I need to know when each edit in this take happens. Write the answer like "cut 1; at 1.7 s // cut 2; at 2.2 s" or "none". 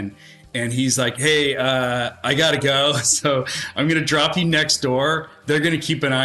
none